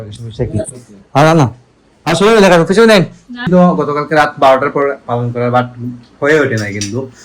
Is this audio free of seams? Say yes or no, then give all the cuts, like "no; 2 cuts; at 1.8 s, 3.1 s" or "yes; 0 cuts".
no; 1 cut; at 3.5 s